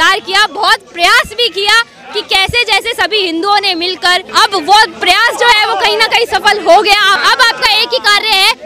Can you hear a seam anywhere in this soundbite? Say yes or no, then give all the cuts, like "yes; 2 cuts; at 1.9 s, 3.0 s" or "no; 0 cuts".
yes; 2 cuts; at 4.3 s, 7.2 s